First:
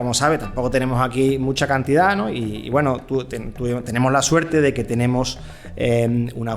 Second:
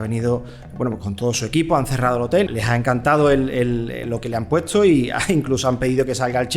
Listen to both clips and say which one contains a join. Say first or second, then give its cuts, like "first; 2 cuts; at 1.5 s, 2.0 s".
second; 1 cut; at 2.5 s